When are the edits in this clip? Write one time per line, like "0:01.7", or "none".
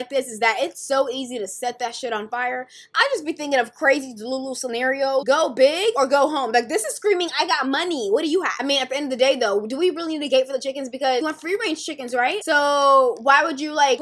0:05.2
0:08.5
0:11.2